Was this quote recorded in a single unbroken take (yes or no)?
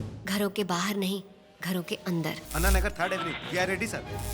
no